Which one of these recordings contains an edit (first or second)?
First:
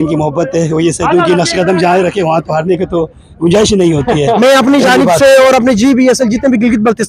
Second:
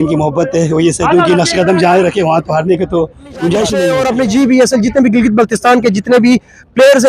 second